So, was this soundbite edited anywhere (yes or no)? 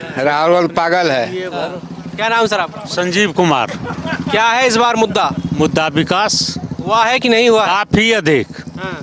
no